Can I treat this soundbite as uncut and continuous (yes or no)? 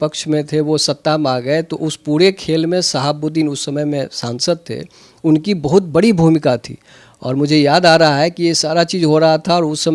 yes